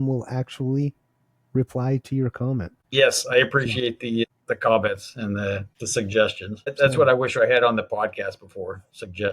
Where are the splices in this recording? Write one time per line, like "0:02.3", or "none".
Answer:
0:02.8
0:04.2
0:05.7
0:06.7